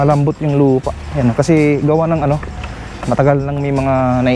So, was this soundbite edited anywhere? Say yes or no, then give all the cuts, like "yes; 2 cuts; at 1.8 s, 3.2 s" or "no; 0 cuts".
no; 0 cuts